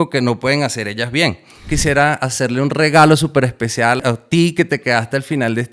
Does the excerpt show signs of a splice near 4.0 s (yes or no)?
yes